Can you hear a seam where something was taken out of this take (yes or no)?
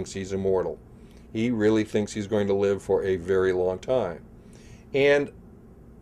no